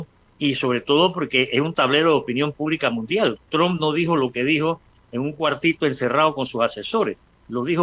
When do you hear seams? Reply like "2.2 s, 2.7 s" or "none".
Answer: none